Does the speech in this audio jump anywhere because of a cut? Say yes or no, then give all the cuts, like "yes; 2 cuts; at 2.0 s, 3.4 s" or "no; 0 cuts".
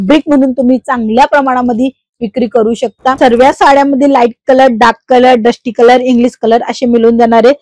yes; 1 cut; at 3.2 s